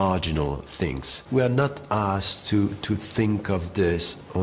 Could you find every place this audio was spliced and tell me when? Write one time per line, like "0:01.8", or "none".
0:01.1